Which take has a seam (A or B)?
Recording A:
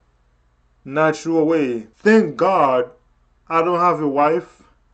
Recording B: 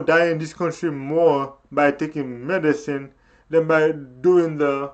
A